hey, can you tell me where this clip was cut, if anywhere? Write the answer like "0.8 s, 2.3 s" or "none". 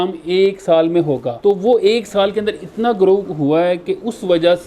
1.3 s